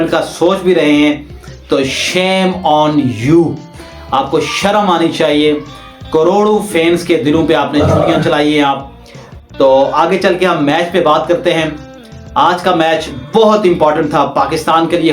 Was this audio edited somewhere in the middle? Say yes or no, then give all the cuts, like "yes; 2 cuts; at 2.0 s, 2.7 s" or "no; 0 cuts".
no; 0 cuts